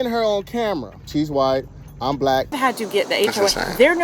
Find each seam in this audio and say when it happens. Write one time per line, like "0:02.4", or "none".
0:01.0
0:02.5